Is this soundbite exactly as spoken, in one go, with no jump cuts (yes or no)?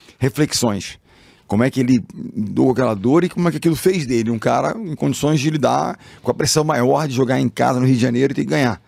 yes